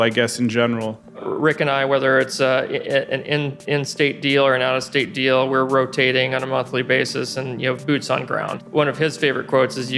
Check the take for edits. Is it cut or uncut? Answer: cut